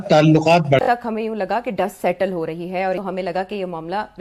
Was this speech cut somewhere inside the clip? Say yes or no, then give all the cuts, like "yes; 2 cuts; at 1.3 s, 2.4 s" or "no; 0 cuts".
no; 0 cuts